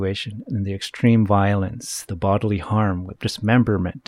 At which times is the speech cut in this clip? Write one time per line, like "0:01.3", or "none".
0:02.1
0:03.1